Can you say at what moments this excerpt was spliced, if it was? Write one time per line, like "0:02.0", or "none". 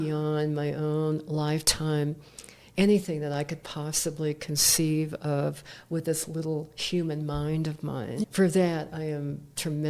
0:08.2